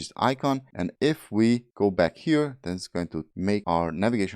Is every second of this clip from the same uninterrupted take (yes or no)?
no